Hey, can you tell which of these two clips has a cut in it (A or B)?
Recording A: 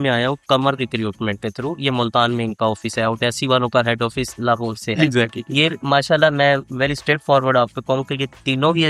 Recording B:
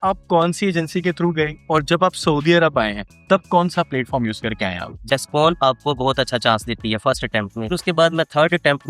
B